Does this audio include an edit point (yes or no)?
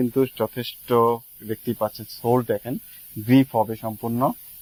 no